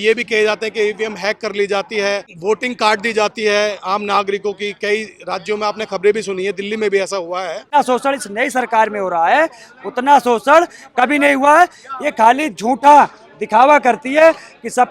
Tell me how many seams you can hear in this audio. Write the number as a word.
two